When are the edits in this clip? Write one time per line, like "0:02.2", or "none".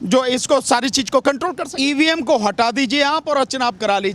0:01.6